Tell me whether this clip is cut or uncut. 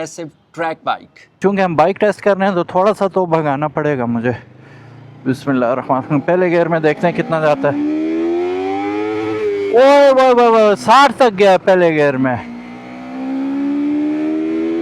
cut